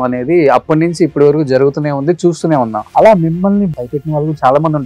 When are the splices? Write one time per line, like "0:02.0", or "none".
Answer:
0:02.8
0:03.7